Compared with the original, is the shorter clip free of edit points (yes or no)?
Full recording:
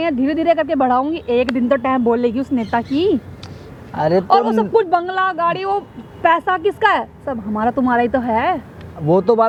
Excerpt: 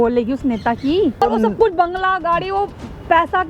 no